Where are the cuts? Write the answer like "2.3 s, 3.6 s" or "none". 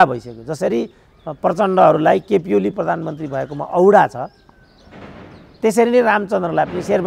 none